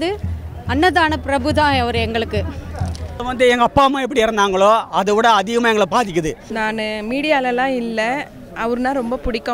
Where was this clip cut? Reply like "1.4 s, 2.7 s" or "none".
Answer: 3.3 s, 6.5 s